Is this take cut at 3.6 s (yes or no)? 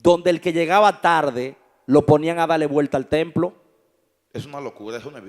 no